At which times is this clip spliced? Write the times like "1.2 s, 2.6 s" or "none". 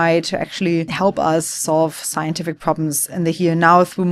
0.9 s